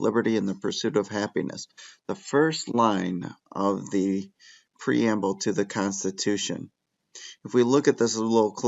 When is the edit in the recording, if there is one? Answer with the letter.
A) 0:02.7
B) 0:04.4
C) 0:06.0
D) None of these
A